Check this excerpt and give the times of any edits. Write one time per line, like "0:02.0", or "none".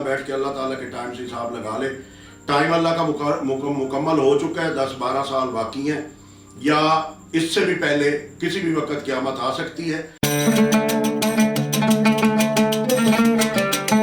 0:10.1